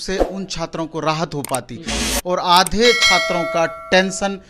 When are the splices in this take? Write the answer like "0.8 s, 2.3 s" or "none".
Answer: 2.0 s